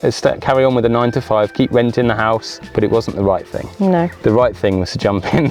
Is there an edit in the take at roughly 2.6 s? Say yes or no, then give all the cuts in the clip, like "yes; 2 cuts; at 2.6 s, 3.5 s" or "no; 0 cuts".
yes; 1 cut; at 2.6 s